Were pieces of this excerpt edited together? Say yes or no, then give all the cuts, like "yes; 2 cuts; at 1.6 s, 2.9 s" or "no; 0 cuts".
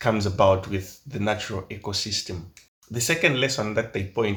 no; 0 cuts